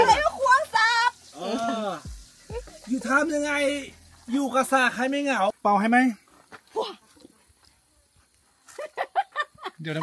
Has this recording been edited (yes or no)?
yes